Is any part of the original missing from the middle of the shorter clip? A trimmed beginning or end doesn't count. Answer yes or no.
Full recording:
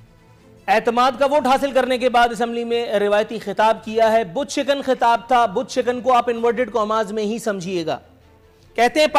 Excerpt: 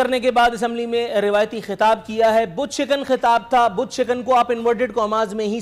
no